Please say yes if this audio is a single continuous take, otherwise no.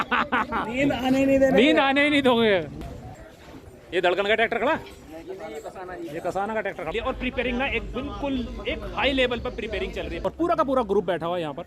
no